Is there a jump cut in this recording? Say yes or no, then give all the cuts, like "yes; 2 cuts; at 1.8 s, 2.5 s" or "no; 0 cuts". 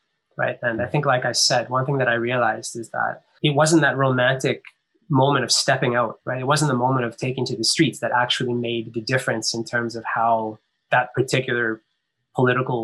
yes; 3 cuts; at 3.3 s, 6.2 s, 10.8 s